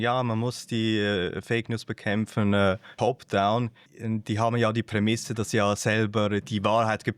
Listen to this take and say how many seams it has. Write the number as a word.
two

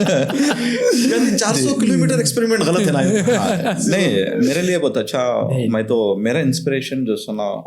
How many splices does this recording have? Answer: zero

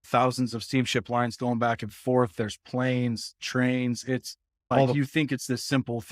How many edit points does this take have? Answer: one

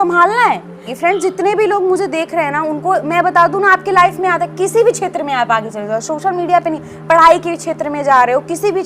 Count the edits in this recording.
one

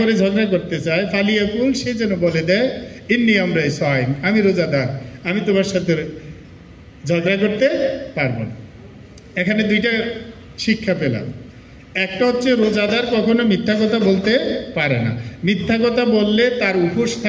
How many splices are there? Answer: zero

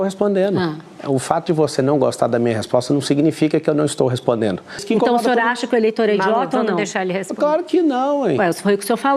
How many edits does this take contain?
one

